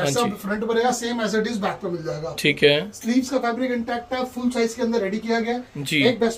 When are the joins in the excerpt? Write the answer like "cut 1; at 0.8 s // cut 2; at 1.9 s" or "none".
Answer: none